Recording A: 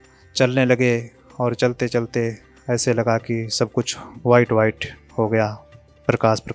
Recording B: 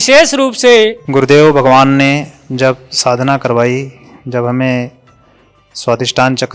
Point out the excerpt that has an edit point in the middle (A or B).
B